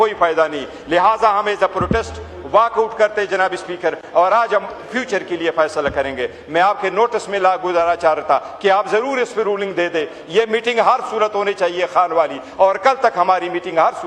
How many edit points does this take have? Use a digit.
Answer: 0